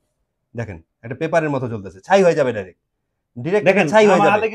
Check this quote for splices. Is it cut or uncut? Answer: uncut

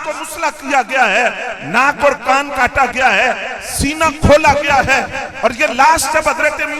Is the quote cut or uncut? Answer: uncut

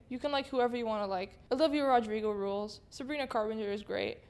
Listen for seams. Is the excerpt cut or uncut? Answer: cut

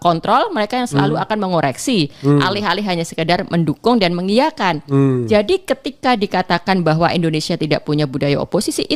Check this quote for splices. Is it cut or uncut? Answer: uncut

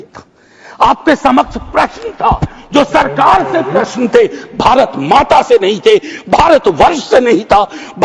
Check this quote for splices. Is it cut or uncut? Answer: uncut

